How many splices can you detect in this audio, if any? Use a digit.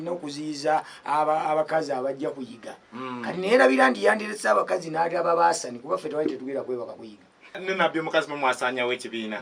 1